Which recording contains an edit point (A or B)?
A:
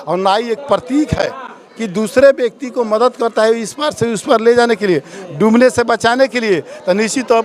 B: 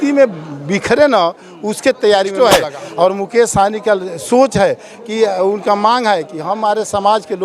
B